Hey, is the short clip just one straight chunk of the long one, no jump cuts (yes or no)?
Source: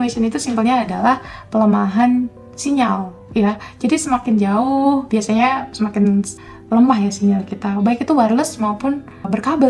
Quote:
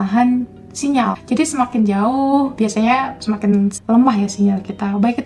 no